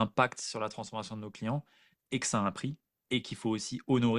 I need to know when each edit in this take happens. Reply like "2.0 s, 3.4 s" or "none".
none